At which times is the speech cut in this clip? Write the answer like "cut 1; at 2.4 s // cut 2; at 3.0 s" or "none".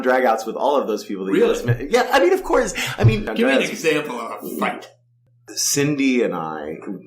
cut 1; at 3.2 s // cut 2; at 5.2 s